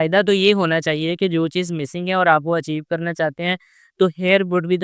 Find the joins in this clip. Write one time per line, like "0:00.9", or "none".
none